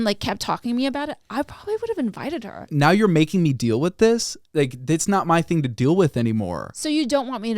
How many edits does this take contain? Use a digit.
1